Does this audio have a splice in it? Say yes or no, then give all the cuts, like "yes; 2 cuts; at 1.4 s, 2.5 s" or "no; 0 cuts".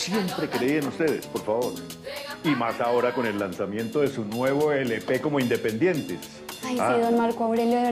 yes; 1 cut; at 6.8 s